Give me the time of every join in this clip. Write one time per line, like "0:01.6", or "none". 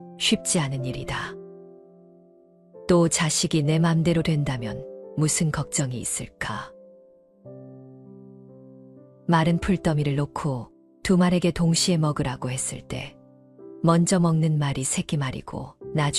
none